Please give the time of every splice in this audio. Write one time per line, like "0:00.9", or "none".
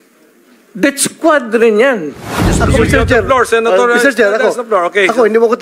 0:02.5

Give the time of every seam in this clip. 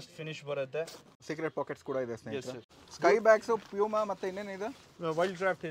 0:01.2
0:02.8

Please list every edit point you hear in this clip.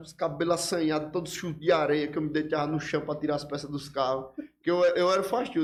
none

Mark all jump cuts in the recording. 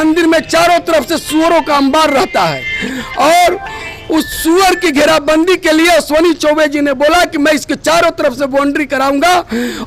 none

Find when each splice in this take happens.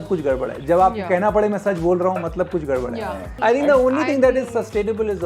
0:03.3

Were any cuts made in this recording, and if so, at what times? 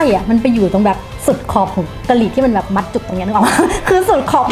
none

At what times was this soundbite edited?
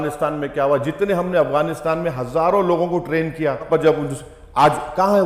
0:03.7

